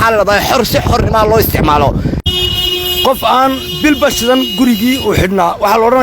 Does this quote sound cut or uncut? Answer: cut